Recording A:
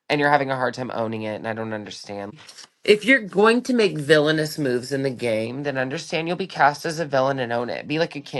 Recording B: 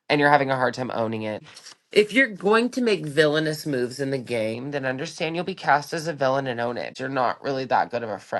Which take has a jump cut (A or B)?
B